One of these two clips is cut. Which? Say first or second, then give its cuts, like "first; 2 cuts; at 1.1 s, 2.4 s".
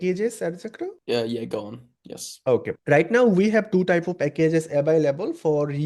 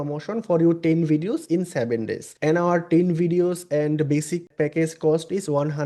second; 2 cuts; at 2.2 s, 4.4 s